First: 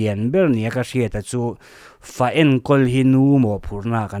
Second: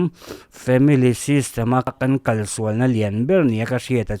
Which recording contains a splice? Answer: second; 1 cut; at 1.9 s

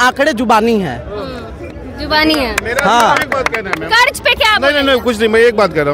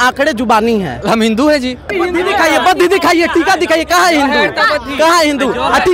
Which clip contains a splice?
second; 2 cuts; at 1.0 s, 1.9 s

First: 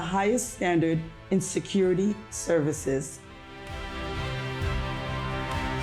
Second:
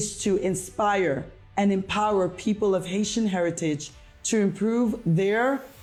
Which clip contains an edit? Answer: first; 1 cut; at 3.5 s

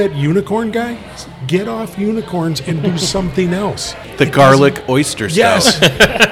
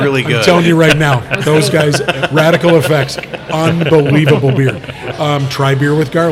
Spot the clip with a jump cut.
first; 1 cut; at 4.0 s

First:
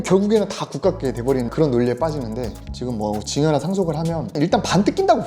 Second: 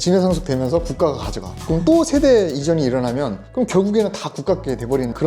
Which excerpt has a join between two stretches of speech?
first; 1 cut; at 2.6 s

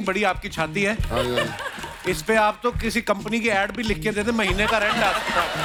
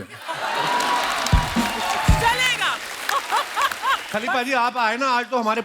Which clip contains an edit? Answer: second; 1 cut; at 4.0 s

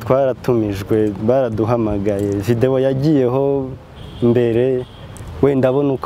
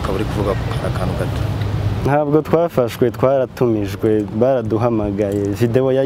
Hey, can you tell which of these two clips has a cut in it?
second; 1 cut; at 2.1 s

